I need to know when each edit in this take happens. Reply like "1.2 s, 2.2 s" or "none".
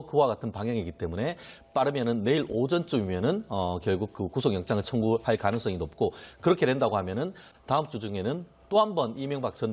4.7 s